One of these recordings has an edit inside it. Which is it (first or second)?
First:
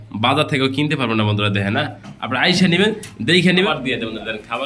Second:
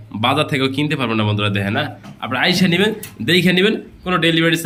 first